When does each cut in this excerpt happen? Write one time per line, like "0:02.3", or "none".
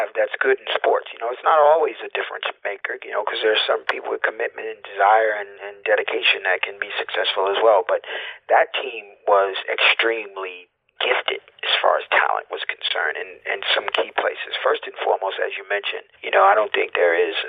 none